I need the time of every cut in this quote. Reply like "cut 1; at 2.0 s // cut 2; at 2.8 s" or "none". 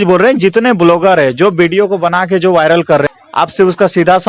cut 1; at 3.1 s